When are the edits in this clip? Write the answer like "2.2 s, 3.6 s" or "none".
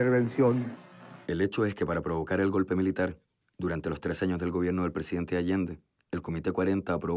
1.0 s